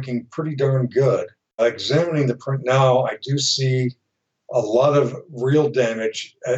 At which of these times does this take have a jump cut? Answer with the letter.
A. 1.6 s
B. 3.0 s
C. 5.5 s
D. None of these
A